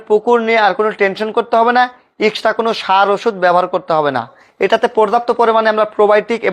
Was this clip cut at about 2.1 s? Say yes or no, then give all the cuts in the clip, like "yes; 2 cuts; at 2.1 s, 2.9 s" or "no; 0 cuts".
no; 1 cut; at 4.4 s